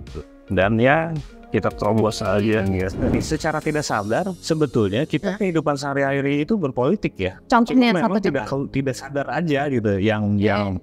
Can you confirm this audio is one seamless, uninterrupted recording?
no; 3 cuts; at 3.1 s, 4.4 s, 7.3 s

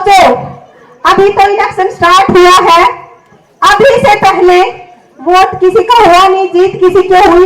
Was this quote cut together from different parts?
no; 0 cuts

